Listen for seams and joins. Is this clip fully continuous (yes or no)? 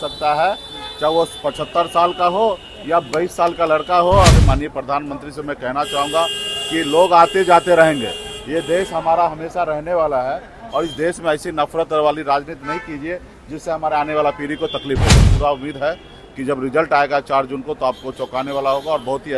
no